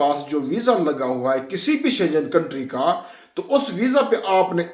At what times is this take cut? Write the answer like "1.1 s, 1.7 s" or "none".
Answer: none